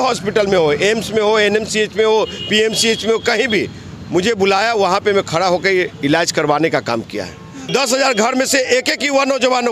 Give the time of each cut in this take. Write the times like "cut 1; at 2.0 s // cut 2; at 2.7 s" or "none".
cut 1; at 7.7 s